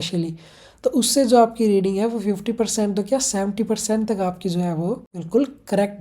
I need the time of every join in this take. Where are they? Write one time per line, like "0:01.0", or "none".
0:05.1